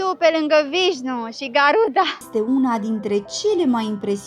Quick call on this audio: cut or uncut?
cut